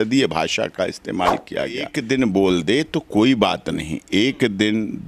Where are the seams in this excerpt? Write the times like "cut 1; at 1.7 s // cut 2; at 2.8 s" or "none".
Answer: cut 1; at 1.9 s